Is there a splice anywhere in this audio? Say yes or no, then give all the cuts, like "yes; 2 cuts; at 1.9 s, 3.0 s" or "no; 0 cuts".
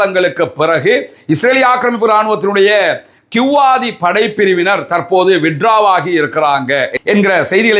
no; 0 cuts